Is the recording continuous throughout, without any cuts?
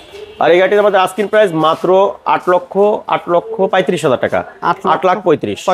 yes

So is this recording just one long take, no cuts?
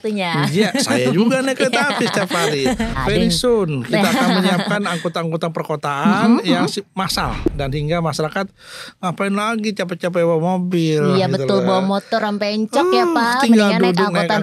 no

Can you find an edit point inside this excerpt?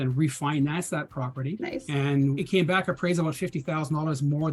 yes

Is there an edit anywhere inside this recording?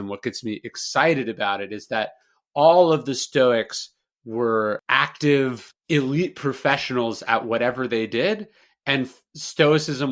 yes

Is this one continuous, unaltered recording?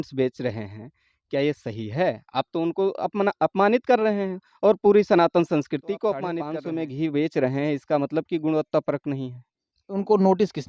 no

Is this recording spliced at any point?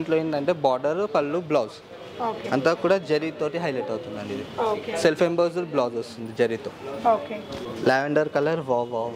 no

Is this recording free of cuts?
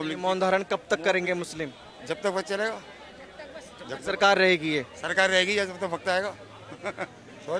yes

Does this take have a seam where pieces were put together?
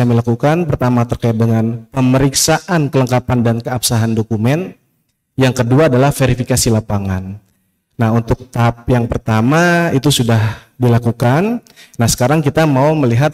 no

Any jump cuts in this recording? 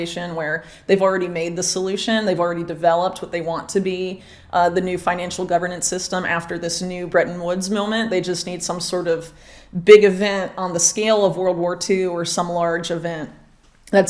no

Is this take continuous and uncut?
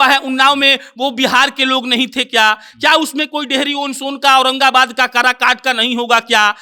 yes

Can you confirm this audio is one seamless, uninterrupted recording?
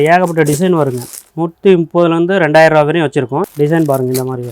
no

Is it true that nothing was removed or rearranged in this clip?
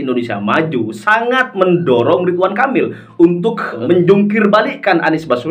no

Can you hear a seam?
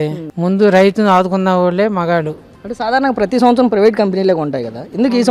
no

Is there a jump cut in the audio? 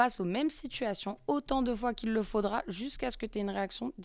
no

